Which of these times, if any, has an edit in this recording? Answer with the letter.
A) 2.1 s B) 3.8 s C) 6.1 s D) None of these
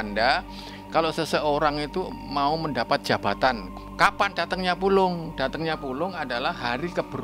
B